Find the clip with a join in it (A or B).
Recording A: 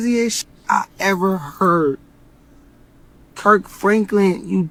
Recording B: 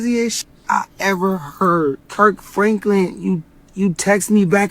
B